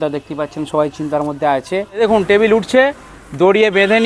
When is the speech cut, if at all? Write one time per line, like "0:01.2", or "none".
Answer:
0:01.9